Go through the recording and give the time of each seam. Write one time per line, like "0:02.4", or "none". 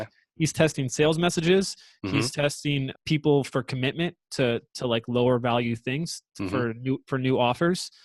0:02.9